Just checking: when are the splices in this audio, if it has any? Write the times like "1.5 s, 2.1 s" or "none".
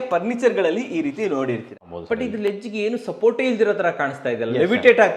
1.9 s